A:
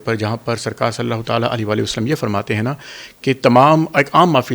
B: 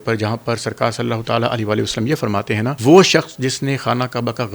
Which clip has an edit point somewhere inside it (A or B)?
B